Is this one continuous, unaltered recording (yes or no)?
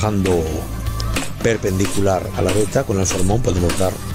yes